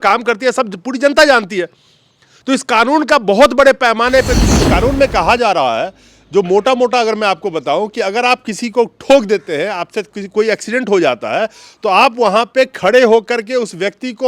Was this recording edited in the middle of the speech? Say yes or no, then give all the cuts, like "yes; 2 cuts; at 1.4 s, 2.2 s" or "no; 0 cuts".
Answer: yes; 1 cut; at 4.4 s